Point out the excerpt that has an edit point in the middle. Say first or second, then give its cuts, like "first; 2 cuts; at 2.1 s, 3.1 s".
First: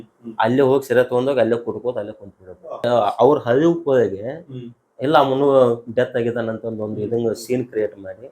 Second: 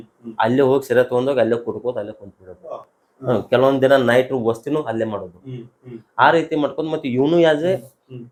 first; 1 cut; at 2.9 s